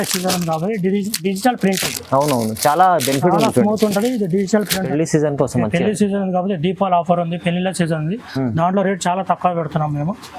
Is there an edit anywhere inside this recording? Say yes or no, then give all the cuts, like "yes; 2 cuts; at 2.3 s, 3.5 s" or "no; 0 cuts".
yes; 1 cut; at 4.7 s